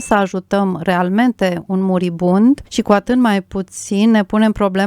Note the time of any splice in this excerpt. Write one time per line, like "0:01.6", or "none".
0:02.7